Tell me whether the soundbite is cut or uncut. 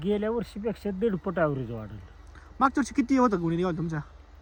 uncut